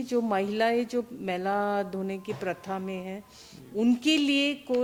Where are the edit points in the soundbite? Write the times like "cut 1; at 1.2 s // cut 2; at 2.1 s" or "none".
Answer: none